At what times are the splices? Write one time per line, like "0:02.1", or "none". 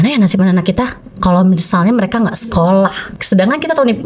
0:03.1